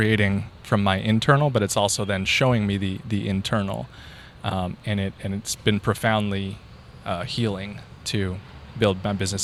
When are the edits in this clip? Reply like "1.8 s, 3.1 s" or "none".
none